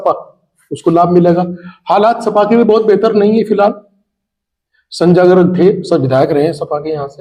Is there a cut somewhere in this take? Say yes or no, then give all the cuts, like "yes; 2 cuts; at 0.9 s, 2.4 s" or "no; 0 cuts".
no; 0 cuts